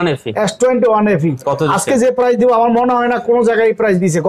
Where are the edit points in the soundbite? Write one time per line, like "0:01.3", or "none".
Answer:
none